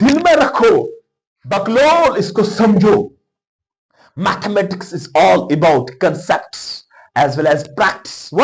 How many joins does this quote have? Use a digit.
0